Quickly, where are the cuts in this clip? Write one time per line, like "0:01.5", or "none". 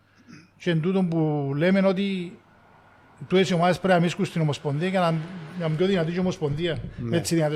none